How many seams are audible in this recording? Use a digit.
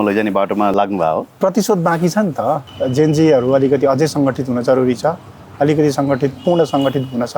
2